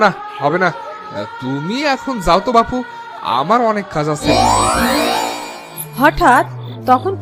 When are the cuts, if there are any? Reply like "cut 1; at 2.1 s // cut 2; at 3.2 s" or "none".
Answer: cut 1; at 4.3 s

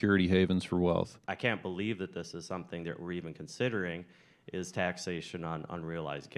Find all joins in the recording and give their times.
cut 1; at 1.2 s

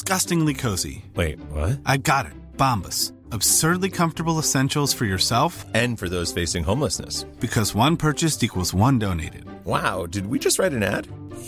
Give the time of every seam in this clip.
none

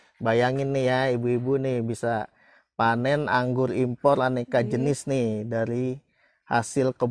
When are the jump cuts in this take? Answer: none

